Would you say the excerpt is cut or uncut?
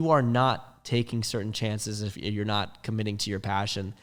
uncut